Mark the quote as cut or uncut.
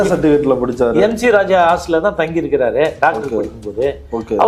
uncut